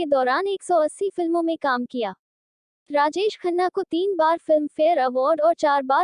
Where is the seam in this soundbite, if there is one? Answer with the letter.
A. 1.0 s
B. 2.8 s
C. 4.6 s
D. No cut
B